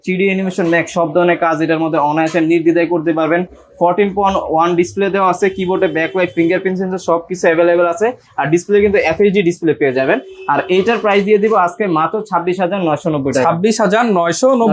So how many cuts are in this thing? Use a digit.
0